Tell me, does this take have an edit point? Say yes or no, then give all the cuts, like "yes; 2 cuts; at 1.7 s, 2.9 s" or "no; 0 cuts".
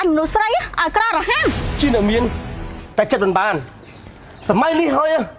yes; 1 cut; at 1.7 s